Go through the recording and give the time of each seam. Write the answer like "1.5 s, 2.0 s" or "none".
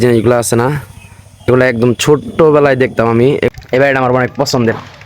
3.5 s